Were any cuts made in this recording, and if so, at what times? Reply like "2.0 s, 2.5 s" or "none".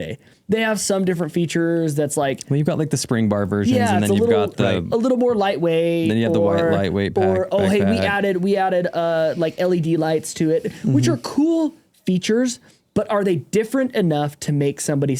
none